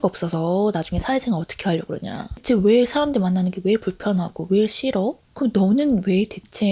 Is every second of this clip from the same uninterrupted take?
no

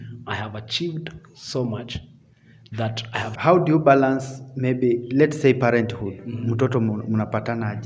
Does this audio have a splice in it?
yes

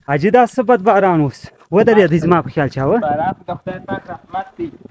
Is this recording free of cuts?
yes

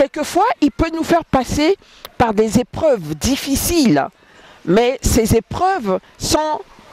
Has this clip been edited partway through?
no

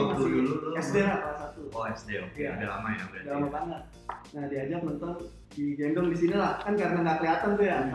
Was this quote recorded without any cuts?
yes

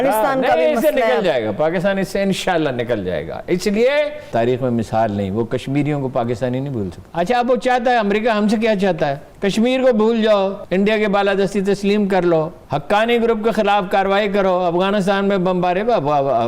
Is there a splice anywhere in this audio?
yes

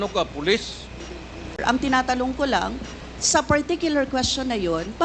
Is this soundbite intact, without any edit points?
no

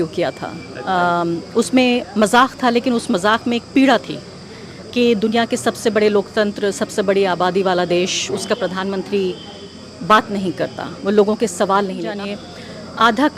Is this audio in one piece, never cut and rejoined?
no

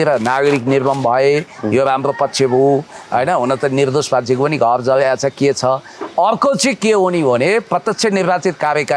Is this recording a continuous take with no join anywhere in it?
yes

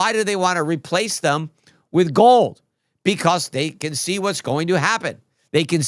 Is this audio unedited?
yes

